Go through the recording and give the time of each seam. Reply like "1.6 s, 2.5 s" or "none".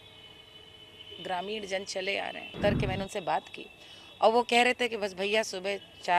2.6 s